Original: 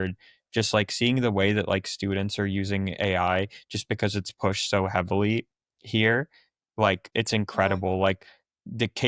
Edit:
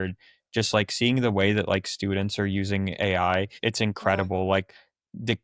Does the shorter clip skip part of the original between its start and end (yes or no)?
yes